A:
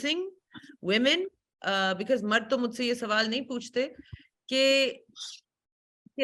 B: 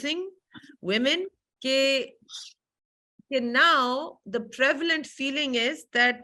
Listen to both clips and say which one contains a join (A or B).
B